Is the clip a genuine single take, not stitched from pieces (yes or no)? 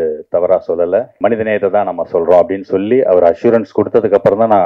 no